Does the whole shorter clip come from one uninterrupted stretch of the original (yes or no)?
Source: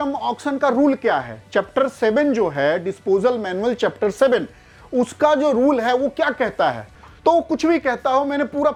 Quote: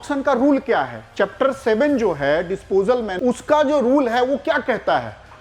no